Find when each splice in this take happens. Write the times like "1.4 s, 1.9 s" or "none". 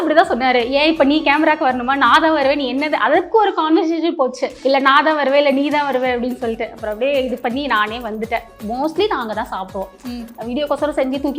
4.5 s, 8.6 s